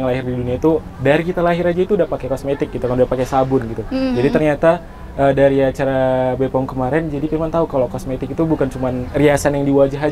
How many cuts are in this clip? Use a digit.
0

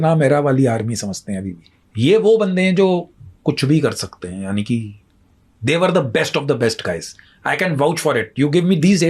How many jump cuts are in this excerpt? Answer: 0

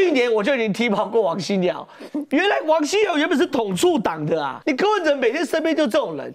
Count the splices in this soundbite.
1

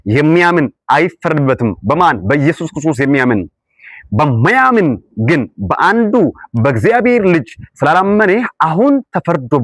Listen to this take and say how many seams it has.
0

